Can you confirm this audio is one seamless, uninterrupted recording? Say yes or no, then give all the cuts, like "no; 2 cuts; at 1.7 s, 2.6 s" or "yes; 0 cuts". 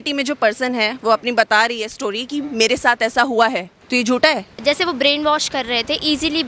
no; 2 cuts; at 3.7 s, 4.5 s